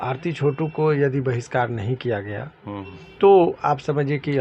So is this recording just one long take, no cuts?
no; 1 cut; at 3.0 s

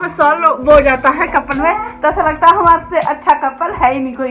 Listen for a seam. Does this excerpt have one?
no; 0 cuts

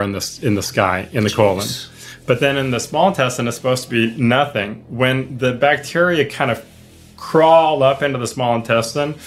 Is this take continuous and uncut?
yes; 0 cuts

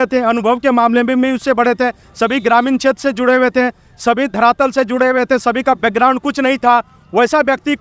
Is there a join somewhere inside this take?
no; 0 cuts

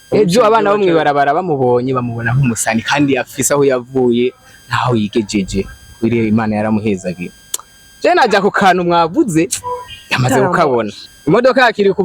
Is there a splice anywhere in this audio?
yes; 1 cut; at 11.0 s

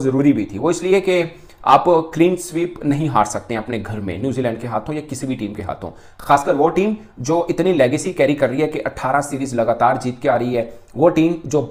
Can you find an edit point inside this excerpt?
no; 0 cuts

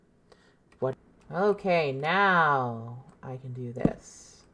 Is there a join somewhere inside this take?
yes; 1 cut; at 0.9 s

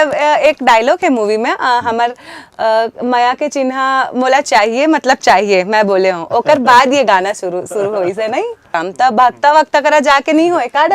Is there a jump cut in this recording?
yes; 1 cut; at 8.7 s

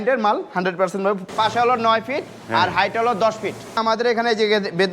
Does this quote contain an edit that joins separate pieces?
yes; 2 cuts; at 1.3 s, 3.8 s

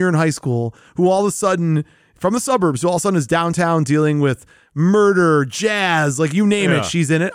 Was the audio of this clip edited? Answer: no; 0 cuts

